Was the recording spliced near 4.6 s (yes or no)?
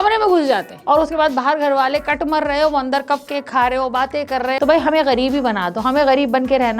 yes